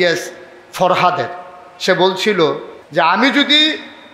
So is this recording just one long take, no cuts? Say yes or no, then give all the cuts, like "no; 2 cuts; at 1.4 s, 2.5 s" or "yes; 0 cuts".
no; 1 cut; at 2.7 s